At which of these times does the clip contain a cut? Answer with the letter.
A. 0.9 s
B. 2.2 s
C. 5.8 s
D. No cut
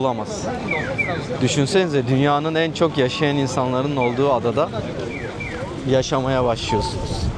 D